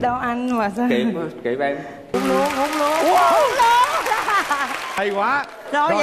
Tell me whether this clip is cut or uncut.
cut